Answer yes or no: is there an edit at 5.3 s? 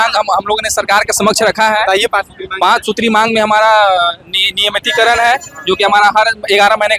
no